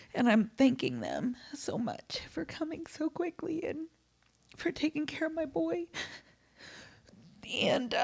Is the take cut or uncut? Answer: uncut